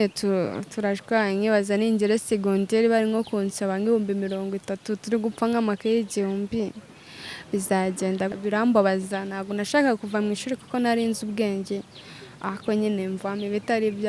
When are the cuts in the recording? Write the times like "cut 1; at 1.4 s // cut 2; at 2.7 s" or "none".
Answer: cut 1; at 8.3 s